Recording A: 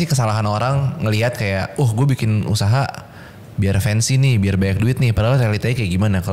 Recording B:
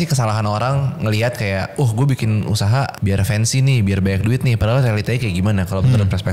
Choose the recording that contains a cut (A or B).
B